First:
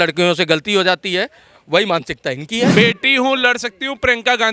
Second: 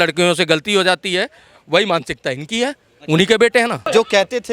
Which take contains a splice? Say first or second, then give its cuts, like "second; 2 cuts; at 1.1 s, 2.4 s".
first; 1 cut; at 2.7 s